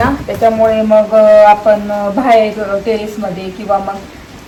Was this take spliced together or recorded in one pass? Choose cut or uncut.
uncut